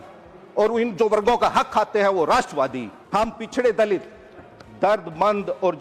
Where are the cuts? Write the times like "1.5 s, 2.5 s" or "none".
2.9 s